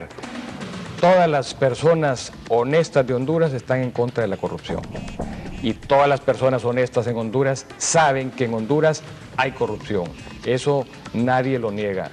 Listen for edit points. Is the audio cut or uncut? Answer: cut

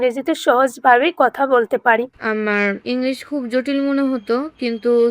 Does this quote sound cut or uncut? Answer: cut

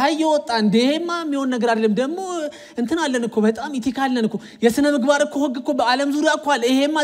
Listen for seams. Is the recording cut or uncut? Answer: uncut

